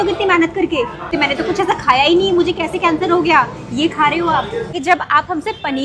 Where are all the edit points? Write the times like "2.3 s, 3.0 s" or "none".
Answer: 1.1 s, 4.7 s